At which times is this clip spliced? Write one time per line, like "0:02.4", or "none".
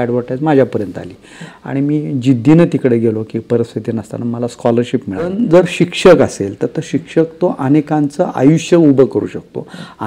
0:05.3